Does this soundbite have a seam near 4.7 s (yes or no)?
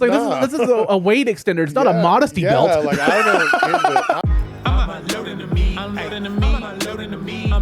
yes